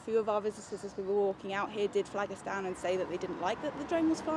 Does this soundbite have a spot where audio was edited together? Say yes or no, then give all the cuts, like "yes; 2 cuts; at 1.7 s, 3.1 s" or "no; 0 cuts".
no; 0 cuts